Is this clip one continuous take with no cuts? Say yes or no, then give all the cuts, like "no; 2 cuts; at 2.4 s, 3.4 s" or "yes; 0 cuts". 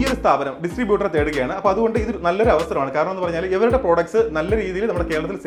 yes; 0 cuts